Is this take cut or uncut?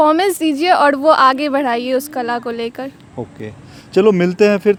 uncut